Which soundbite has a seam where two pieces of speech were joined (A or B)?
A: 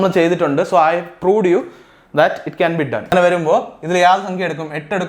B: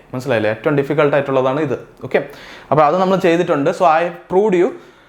A